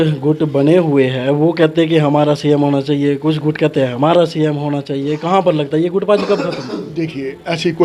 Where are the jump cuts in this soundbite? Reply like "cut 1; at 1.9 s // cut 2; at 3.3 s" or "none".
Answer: none